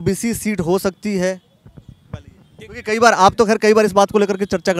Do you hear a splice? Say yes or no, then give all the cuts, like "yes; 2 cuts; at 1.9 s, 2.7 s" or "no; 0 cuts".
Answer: no; 0 cuts